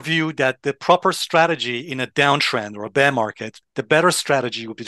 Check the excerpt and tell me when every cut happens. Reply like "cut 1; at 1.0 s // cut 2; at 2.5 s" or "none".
cut 1; at 3.7 s